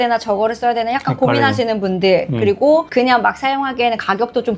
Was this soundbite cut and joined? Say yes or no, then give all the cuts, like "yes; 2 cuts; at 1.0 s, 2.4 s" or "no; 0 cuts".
no; 0 cuts